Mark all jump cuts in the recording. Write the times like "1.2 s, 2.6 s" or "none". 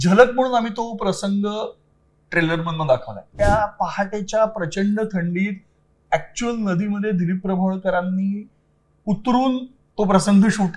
3.2 s